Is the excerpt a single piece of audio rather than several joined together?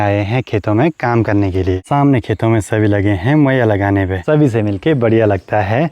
no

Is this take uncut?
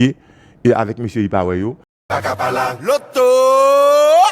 no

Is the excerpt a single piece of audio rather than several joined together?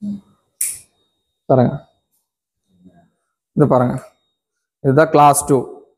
no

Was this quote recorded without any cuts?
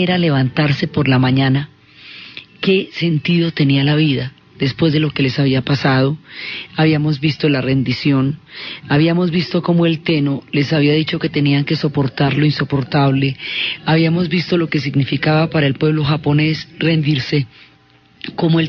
no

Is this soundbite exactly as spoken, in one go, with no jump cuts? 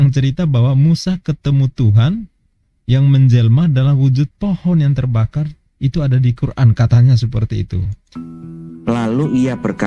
no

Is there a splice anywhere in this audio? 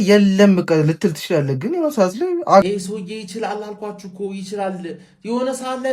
yes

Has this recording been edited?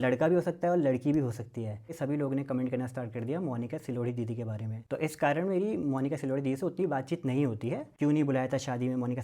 yes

